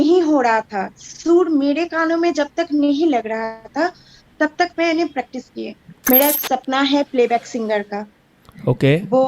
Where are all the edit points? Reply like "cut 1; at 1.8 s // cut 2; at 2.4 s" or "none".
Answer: cut 1; at 5.9 s